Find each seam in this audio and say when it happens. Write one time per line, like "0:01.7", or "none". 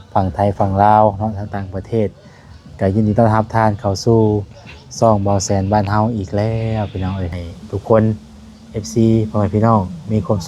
0:07.4